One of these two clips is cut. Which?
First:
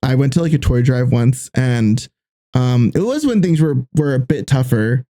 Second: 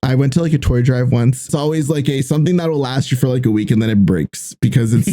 second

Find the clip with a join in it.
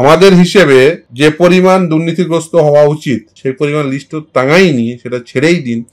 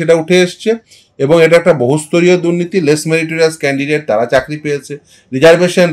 first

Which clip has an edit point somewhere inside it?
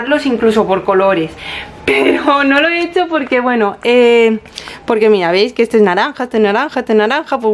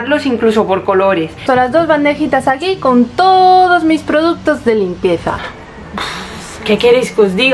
second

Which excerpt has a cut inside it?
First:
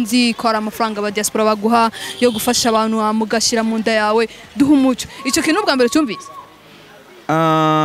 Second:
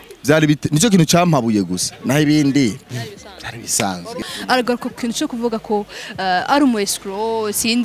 second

